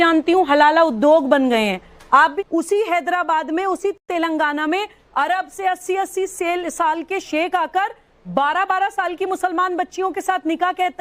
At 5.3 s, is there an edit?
no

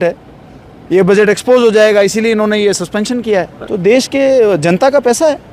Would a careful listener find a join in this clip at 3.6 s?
yes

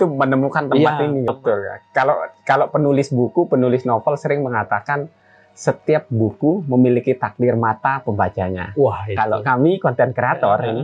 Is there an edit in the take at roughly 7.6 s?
no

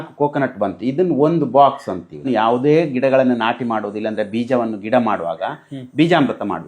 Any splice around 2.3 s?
yes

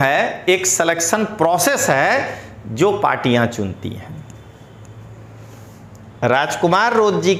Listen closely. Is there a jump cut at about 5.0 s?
no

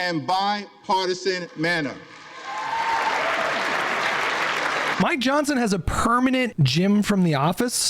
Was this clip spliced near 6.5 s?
yes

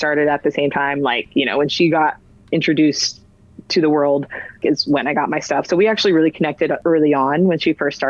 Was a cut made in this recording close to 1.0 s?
no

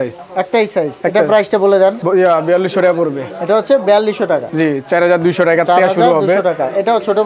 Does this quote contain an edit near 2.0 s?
no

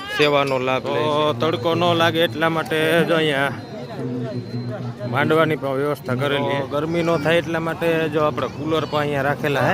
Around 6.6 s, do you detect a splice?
yes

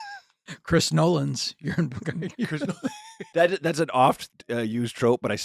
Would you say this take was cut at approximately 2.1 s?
no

